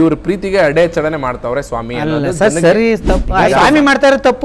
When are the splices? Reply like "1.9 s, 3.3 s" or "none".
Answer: 3.3 s